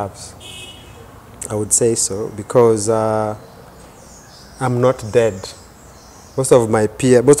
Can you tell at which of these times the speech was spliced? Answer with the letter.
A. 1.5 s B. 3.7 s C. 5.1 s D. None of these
D